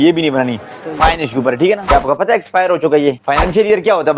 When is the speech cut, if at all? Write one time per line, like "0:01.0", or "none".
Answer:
0:01.9
0:03.2